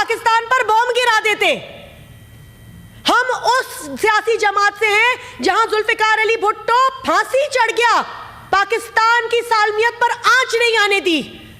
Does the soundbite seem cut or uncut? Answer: uncut